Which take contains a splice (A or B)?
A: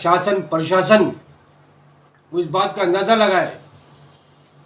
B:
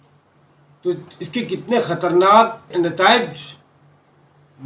B